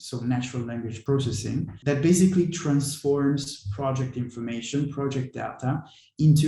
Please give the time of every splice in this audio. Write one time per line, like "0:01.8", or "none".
0:01.1